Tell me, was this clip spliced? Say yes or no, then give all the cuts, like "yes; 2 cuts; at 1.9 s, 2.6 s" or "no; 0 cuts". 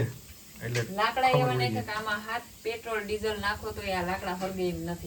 no; 0 cuts